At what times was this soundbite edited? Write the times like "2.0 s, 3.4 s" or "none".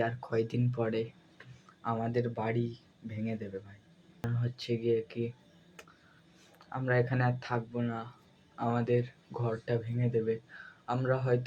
4.3 s